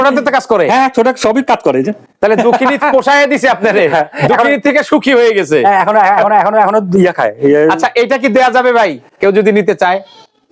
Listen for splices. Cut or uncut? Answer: uncut